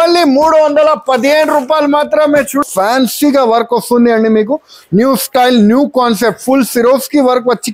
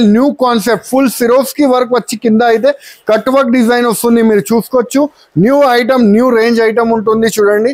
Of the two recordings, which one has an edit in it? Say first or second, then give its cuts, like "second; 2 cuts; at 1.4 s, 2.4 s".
first; 1 cut; at 2.6 s